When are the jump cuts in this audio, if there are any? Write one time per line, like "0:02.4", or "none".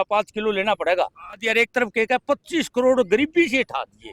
0:01.4